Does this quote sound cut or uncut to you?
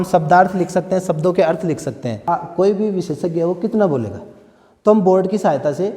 cut